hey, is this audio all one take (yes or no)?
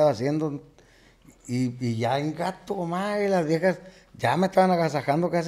yes